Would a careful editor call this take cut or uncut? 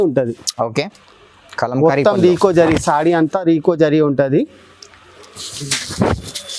uncut